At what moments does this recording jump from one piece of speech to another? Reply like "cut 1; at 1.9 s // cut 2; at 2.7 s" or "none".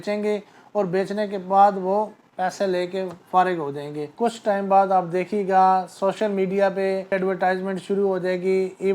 cut 1; at 4.1 s // cut 2; at 7.1 s